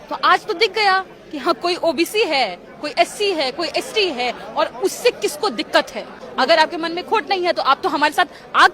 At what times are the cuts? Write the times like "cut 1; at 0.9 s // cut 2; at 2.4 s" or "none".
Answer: cut 1; at 6.2 s